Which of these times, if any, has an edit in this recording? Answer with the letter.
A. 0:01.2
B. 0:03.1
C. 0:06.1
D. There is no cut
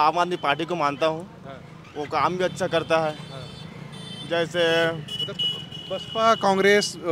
D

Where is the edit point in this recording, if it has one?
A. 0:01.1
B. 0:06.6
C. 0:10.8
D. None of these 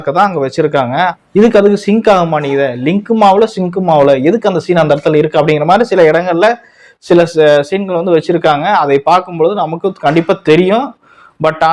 A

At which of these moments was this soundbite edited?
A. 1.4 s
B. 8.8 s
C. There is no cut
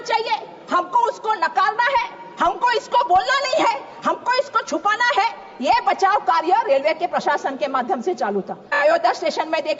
B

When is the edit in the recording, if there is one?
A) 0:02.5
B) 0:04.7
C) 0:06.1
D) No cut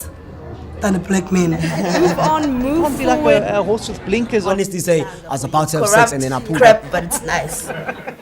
C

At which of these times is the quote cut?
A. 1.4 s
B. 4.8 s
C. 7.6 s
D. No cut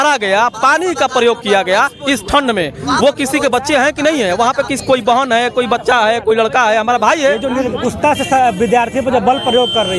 C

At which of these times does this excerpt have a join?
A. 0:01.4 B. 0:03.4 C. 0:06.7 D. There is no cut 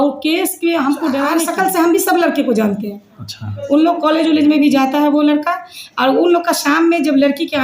A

